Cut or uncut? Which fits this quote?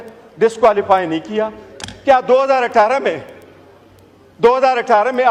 uncut